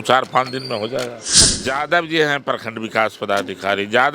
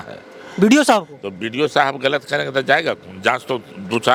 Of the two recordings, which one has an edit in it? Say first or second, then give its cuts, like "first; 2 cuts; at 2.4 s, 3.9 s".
first; 1 cut; at 1.2 s